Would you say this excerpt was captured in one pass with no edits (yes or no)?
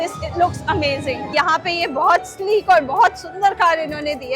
no